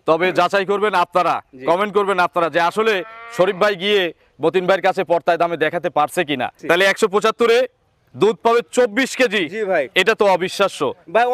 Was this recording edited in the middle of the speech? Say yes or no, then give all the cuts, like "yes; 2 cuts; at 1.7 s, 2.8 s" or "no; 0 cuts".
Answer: yes; 1 cut; at 6.5 s